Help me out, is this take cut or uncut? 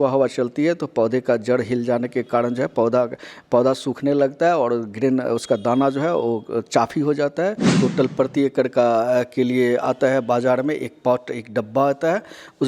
cut